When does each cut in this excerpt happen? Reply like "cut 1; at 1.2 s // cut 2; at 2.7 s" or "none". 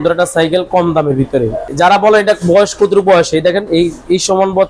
cut 1; at 1.7 s